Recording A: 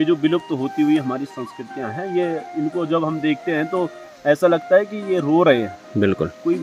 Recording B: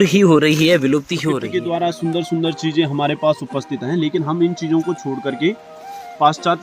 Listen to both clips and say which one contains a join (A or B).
B